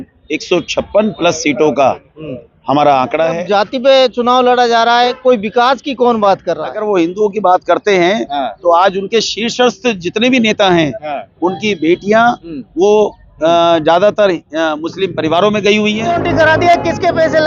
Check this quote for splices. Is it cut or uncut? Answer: cut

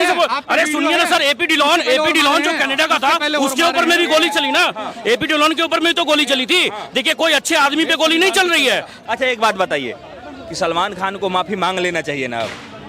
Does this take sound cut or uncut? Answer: cut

